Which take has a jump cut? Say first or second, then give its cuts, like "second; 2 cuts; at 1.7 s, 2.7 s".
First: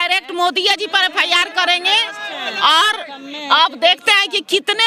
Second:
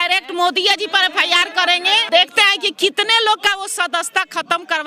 second; 1 cut; at 2.0 s